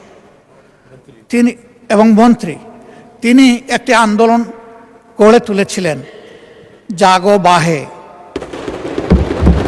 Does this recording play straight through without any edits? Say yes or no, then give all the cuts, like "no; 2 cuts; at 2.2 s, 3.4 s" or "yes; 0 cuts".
yes; 0 cuts